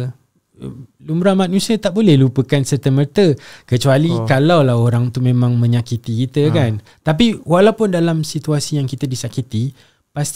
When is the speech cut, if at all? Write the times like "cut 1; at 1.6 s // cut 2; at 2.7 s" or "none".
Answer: none